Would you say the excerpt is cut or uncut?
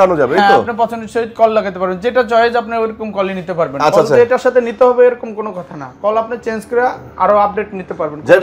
uncut